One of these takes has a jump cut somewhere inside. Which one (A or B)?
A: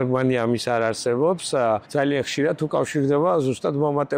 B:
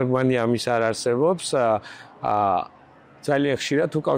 A